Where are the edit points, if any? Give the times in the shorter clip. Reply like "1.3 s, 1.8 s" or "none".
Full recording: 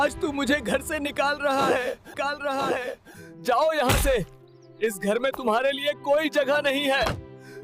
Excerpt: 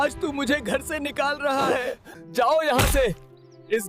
2.5 s